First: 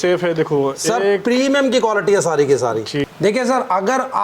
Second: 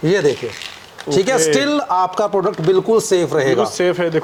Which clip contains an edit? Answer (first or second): first